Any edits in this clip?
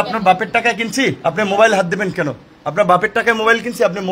no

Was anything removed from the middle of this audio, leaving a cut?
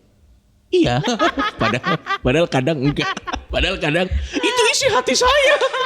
yes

